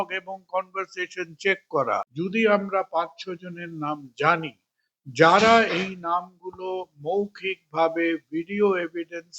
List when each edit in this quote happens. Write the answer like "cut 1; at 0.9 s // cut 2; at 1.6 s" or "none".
cut 1; at 2.1 s

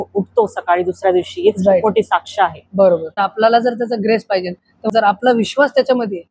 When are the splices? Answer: cut 1; at 3.2 s // cut 2; at 4.9 s

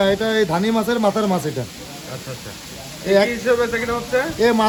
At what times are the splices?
none

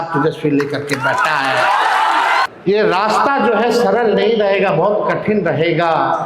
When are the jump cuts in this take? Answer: cut 1; at 2.5 s

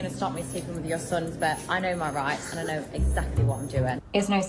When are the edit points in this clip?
none

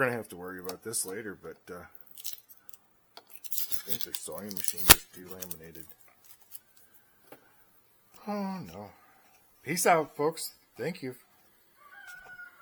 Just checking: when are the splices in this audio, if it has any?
none

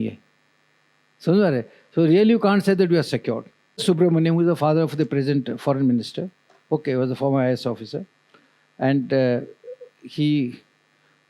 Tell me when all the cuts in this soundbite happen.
cut 1; at 3.8 s

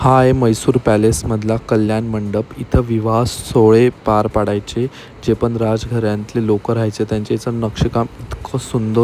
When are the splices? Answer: none

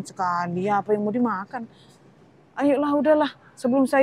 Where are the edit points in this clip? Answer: none

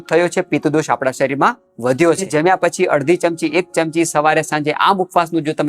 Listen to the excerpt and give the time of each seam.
cut 1; at 2.3 s

